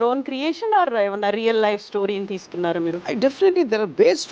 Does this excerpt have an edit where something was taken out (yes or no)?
yes